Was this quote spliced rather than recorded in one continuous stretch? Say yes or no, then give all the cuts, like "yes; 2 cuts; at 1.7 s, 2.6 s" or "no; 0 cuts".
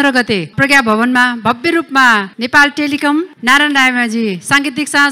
no; 0 cuts